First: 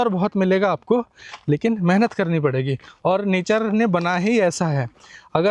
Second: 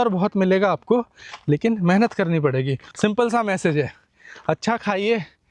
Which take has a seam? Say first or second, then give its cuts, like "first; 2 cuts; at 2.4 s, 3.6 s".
second; 1 cut; at 2.8 s